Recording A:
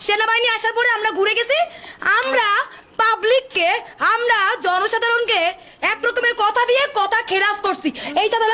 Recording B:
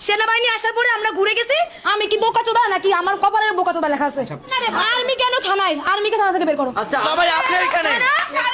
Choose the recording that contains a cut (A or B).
B